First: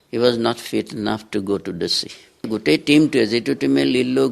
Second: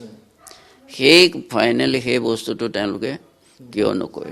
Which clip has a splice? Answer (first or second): first